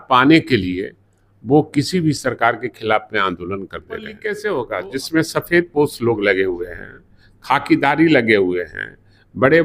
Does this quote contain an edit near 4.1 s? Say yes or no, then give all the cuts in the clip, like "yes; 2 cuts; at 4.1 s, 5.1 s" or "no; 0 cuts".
yes; 1 cut; at 4.1 s